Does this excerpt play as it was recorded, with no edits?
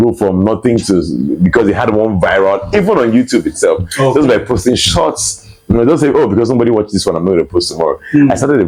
yes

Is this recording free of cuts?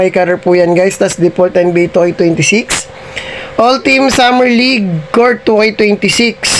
yes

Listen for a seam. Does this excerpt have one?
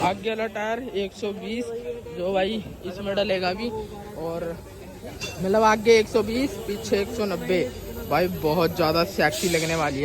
no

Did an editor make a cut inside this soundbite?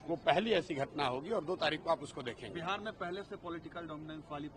no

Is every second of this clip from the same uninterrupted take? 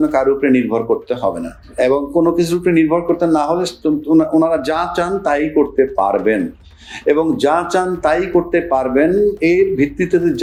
yes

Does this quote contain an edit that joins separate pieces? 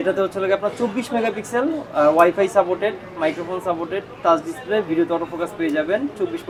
no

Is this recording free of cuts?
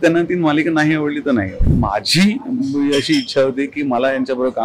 no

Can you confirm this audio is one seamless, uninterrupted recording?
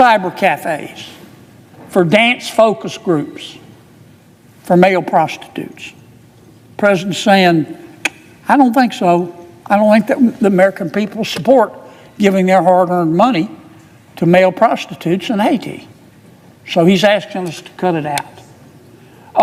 yes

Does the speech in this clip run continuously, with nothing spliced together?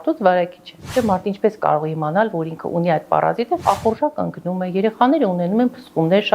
no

